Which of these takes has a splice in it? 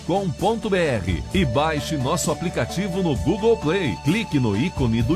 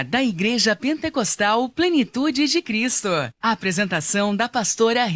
second; 1 cut; at 3.3 s

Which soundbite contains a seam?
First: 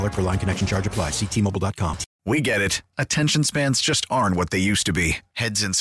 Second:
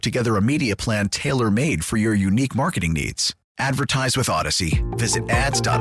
first; 1 cut; at 2.1 s

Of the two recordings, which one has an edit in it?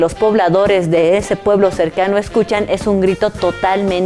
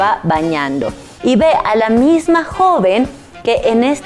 second; 1 cut; at 1.1 s

